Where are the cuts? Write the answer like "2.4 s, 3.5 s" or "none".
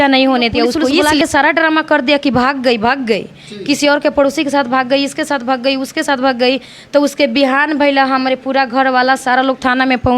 1.1 s